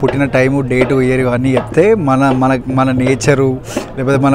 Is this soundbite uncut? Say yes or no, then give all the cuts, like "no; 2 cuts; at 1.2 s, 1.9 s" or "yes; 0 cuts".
yes; 0 cuts